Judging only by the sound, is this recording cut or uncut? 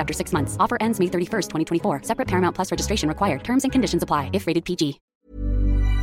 cut